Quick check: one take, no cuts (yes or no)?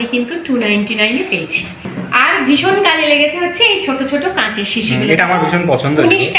no